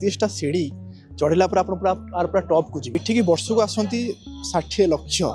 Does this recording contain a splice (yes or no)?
yes